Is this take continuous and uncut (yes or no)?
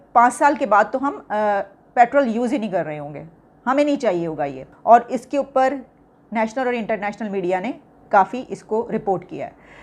no